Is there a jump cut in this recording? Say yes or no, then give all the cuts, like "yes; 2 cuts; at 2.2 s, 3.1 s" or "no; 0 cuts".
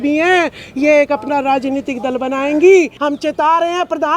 yes; 1 cut; at 2.9 s